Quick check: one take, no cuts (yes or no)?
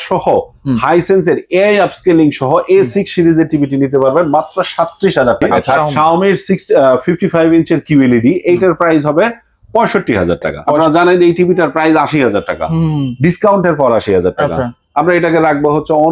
no